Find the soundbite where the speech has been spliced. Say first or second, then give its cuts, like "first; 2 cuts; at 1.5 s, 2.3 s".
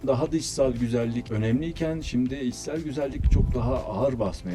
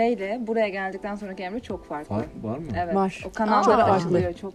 first; 1 cut; at 1.3 s